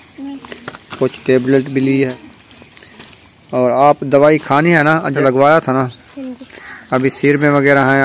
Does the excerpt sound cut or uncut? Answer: cut